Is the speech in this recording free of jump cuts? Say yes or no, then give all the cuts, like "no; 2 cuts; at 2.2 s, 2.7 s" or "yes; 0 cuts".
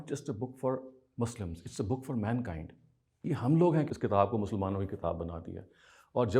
no; 1 cut; at 3.9 s